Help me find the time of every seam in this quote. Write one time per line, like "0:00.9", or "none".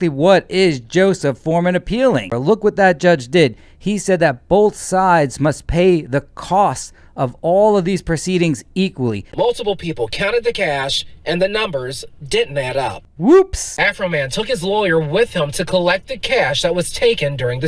0:02.4
0:09.3
0:13.6

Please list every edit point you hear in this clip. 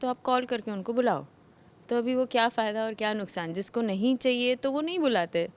none

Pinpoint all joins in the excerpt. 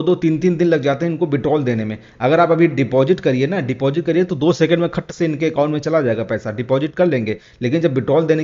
none

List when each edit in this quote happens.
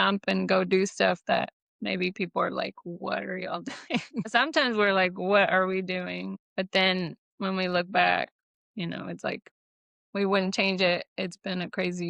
0:04.3
0:06.4

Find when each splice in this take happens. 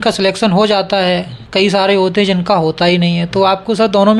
none

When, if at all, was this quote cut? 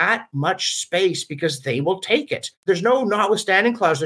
0:02.6

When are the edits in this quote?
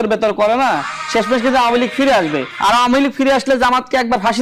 0:02.5

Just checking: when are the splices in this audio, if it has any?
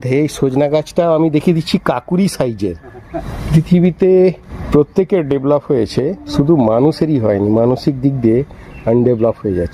0:03.3
0:04.5
0:06.2

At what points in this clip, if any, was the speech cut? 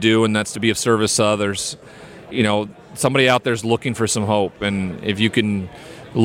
0:01.7

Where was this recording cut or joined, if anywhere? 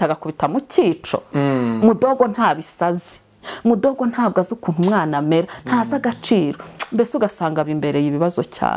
none

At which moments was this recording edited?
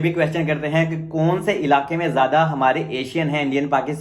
none

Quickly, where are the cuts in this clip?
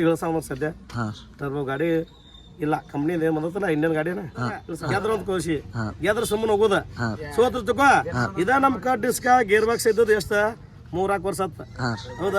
0:04.7

